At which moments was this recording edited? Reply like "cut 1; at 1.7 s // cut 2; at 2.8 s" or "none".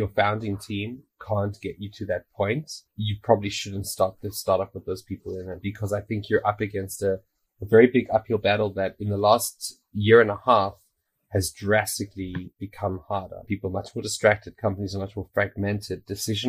none